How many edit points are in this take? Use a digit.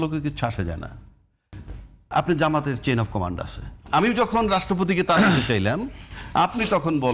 1